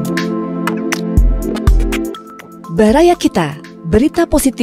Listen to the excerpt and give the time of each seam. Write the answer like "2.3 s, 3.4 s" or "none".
none